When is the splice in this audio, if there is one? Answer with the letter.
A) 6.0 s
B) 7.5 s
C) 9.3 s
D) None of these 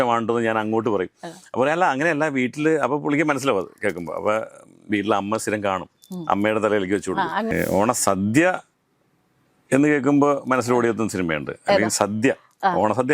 B